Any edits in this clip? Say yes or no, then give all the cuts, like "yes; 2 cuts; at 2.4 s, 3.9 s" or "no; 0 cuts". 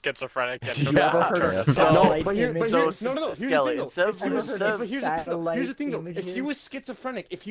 no; 0 cuts